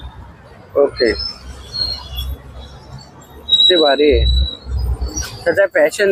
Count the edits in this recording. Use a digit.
0